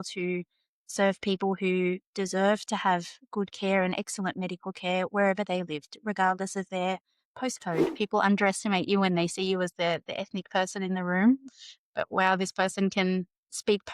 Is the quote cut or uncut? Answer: cut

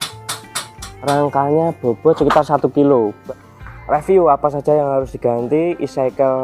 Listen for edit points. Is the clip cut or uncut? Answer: cut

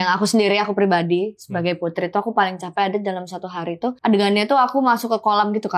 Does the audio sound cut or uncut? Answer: cut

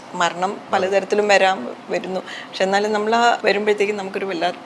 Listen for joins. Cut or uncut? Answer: cut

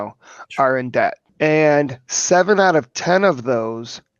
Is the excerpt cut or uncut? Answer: cut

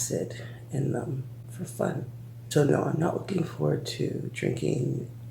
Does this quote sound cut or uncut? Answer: uncut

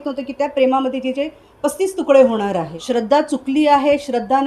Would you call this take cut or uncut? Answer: cut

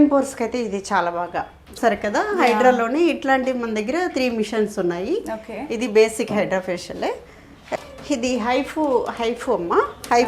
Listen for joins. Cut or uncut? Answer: cut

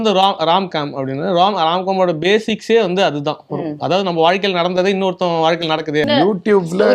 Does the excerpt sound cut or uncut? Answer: cut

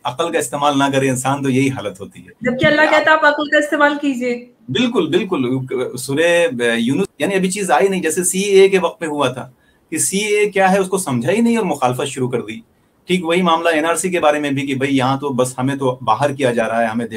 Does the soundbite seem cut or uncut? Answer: cut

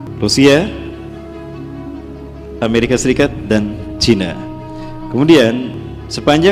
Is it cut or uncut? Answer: uncut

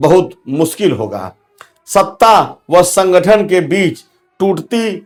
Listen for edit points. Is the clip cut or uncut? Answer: uncut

